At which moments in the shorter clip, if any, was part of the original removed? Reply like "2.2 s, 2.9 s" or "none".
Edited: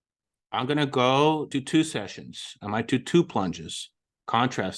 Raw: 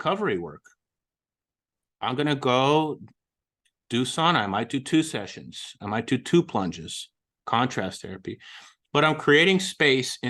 1.5 s